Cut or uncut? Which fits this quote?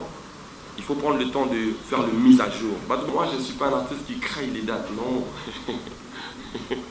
cut